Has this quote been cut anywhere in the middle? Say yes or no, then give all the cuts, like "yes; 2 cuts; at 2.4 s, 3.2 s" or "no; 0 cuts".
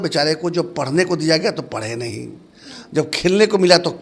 no; 0 cuts